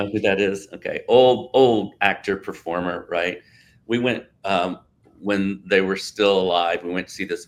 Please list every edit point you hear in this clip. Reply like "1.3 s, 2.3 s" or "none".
none